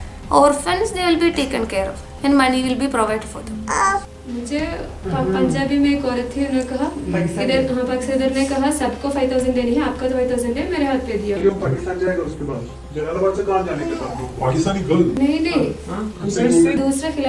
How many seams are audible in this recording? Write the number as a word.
one